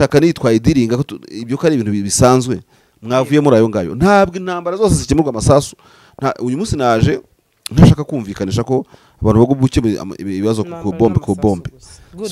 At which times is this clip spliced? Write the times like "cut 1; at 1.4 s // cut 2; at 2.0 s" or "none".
none